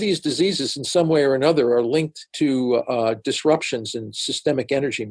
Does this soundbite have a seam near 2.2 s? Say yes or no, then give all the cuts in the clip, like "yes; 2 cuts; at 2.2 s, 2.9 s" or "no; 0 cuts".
yes; 1 cut; at 2.2 s